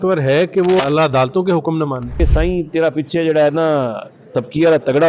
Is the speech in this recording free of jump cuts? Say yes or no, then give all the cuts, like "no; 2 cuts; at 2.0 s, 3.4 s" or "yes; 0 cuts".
no; 2 cuts; at 0.8 s, 2.2 s